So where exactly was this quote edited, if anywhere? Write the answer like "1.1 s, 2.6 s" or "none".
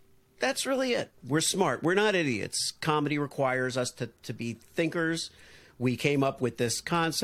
none